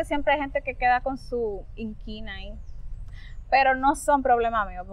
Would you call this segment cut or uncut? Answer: uncut